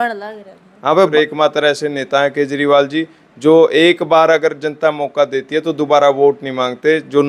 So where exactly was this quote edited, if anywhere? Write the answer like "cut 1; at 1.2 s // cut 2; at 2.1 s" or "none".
cut 1; at 1.1 s